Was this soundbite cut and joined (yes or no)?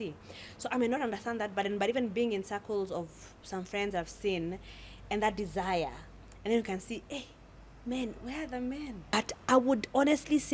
yes